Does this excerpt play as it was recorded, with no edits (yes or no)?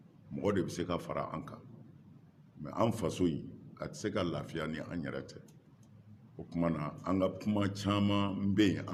yes